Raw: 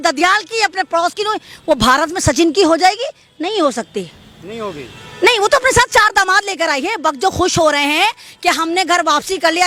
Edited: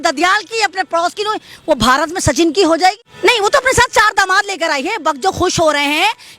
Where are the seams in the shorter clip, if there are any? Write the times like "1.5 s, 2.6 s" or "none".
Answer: 3.1 s